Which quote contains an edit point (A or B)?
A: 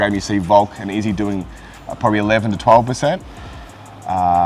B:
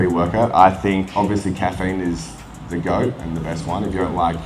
B